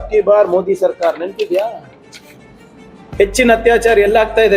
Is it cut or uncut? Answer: uncut